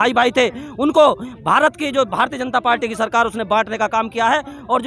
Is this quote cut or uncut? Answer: uncut